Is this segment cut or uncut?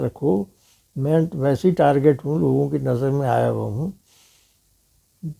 uncut